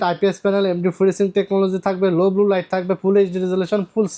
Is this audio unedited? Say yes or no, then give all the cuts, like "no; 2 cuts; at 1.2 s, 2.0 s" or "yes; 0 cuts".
yes; 0 cuts